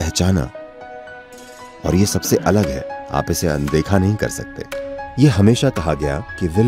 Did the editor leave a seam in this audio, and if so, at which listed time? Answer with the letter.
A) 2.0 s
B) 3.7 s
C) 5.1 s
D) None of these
C